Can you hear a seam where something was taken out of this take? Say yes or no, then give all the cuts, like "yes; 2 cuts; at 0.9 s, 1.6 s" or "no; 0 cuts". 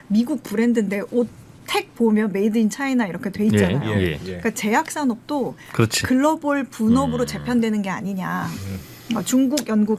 no; 0 cuts